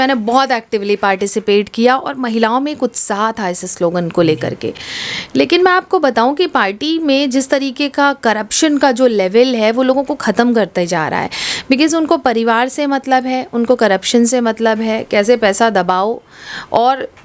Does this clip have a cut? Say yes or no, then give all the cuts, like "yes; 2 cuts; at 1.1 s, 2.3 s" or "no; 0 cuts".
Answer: no; 0 cuts